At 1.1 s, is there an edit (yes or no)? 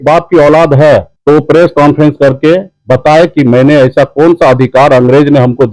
yes